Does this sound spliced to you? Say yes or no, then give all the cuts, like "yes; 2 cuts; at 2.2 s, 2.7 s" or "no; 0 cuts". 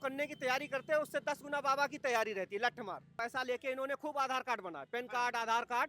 yes; 1 cut; at 3.1 s